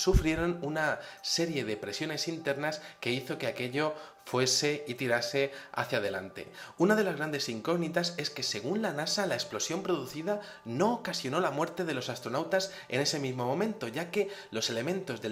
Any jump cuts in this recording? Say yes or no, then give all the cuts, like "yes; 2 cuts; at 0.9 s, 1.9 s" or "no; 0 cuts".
no; 0 cuts